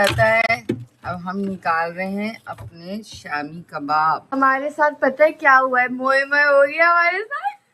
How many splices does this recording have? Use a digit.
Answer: 1